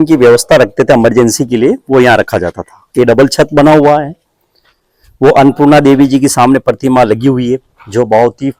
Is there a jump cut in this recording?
no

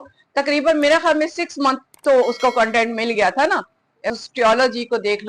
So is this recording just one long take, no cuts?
no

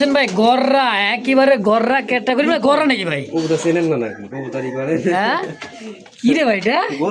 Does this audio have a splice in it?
no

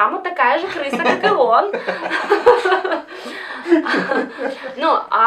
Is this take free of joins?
yes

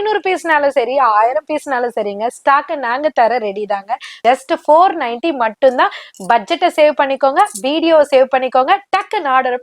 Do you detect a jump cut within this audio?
yes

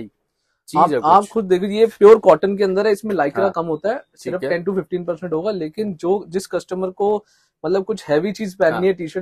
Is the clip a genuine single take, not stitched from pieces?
yes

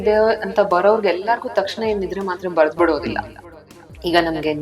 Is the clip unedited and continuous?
no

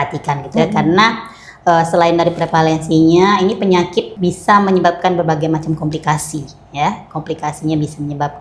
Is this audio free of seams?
no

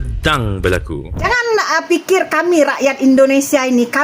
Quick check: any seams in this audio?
yes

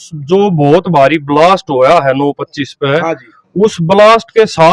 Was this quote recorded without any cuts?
yes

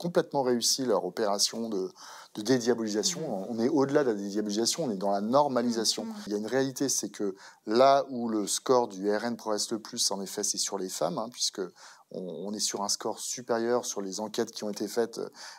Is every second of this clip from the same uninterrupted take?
no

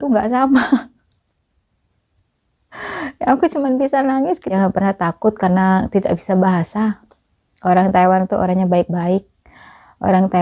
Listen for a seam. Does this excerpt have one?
yes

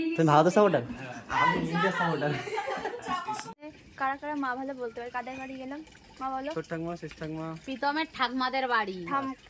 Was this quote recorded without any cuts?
no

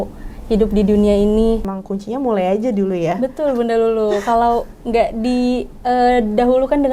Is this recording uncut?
no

